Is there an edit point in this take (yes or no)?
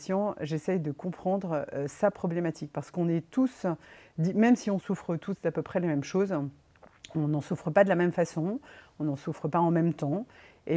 no